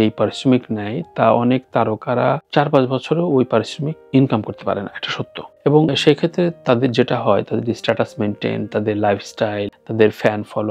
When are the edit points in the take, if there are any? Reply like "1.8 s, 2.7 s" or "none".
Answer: 5.9 s